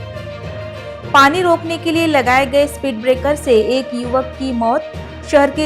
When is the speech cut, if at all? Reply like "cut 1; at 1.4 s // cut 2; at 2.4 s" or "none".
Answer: cut 1; at 1.1 s